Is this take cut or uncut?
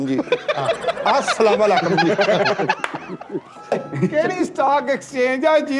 cut